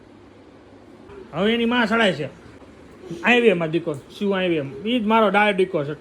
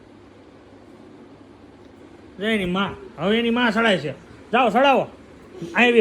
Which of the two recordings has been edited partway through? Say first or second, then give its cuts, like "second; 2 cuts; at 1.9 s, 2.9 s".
first; 2 cuts; at 1.2 s, 2.6 s